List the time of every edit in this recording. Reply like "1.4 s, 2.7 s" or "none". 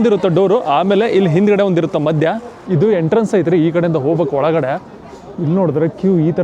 2.5 s

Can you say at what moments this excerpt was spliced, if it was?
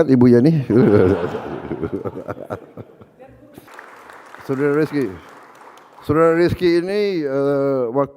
3.7 s

